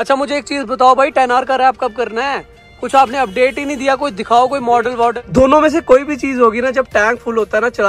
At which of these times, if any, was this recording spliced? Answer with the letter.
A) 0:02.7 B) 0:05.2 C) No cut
B